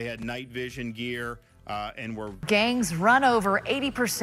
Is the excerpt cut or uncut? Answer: cut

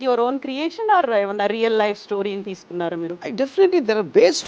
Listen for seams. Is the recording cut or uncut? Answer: cut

